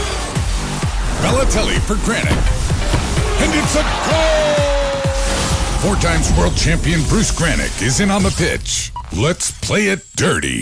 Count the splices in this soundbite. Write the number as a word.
zero